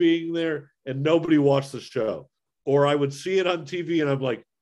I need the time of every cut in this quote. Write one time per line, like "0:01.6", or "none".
0:02.4

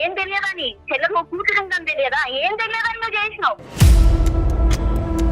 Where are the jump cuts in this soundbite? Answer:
0:03.6

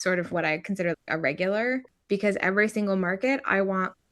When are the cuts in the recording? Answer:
0:01.9

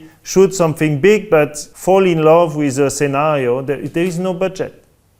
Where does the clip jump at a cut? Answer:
0:01.7

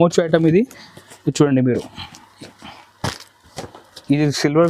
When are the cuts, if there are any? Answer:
none

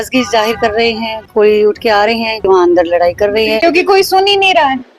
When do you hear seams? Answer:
0:01.2
0:02.5
0:03.6

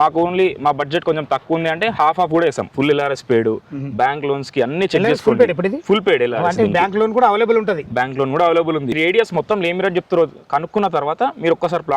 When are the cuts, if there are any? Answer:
0:02.7
0:08.9

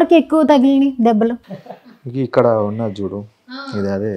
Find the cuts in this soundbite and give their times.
0:01.5

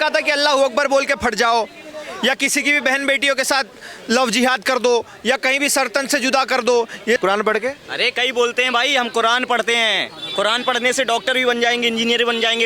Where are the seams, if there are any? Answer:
0:07.2

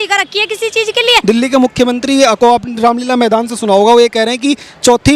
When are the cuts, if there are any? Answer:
0:01.2

